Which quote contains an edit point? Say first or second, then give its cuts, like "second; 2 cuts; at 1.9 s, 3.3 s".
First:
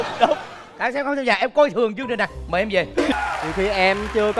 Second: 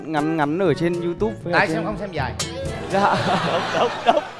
first; 1 cut; at 3.1 s